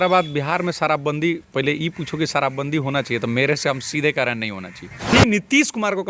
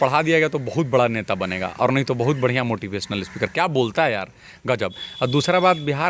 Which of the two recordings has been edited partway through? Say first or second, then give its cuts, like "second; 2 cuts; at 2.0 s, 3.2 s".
first; 1 cut; at 5.1 s